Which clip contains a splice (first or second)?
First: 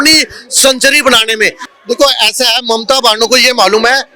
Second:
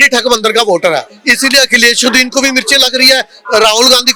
first